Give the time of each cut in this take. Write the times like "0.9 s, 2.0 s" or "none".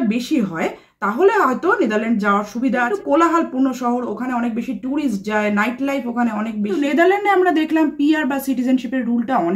2.9 s, 6.8 s